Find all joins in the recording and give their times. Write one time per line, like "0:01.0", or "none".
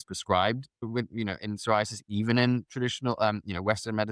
none